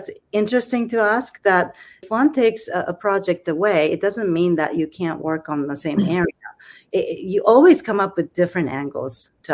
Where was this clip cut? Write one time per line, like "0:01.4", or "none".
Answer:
0:02.0
0:06.8